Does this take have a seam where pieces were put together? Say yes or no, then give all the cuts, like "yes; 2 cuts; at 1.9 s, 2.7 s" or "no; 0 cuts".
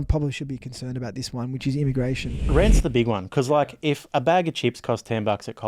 yes; 1 cut; at 2.5 s